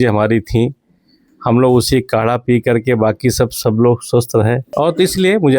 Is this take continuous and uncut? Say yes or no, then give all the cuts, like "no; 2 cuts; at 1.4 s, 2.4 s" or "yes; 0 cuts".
no; 1 cut; at 4.7 s